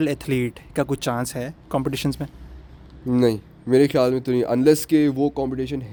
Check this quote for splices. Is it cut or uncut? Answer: uncut